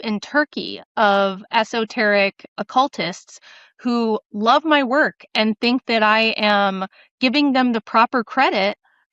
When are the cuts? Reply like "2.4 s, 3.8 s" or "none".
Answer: 2.5 s